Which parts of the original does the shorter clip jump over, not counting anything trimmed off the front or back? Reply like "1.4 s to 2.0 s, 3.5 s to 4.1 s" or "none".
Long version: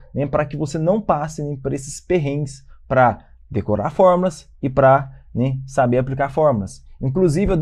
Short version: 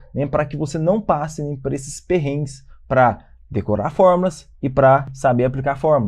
5.1 s to 5.6 s